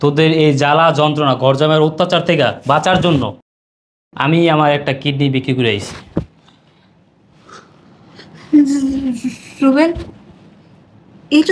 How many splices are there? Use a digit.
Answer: 0